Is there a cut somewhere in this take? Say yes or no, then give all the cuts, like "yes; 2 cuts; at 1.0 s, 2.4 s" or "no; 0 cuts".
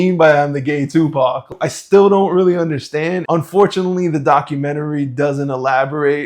yes; 2 cuts; at 1.5 s, 3.2 s